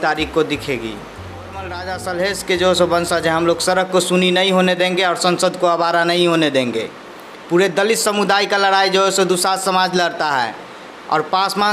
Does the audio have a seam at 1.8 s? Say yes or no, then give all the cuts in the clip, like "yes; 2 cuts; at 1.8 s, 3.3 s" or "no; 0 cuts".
yes; 1 cut; at 1.8 s